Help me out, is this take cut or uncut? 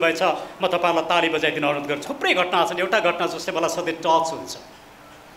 cut